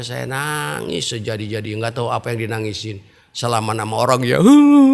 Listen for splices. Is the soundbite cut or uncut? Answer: uncut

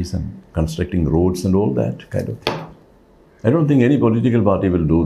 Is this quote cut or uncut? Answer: uncut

